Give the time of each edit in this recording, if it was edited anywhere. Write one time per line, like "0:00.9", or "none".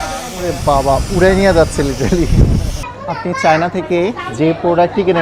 0:02.9